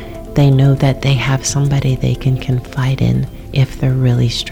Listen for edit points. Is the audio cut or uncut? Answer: cut